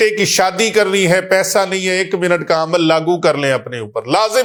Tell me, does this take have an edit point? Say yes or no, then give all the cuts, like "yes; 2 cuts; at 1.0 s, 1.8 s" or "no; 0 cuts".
no; 0 cuts